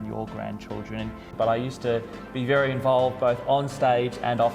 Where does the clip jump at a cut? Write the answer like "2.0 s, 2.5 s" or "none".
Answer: 1.2 s